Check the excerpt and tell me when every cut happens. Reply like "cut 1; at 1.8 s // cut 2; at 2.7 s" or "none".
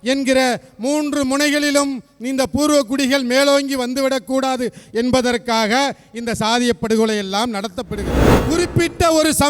cut 1; at 8.3 s